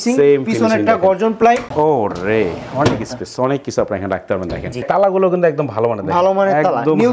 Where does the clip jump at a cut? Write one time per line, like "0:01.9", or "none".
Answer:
0:01.7
0:04.8